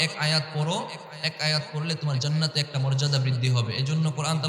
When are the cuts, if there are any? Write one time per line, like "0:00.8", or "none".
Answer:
none